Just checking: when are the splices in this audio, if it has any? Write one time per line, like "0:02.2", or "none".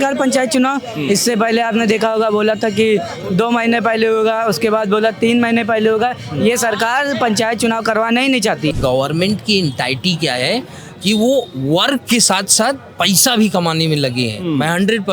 0:08.7